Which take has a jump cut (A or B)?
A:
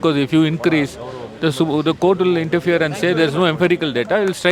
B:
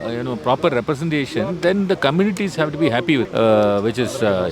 B